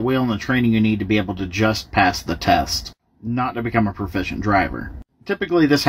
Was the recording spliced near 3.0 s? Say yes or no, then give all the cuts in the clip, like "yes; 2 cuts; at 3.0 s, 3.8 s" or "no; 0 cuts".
no; 1 cut; at 4.9 s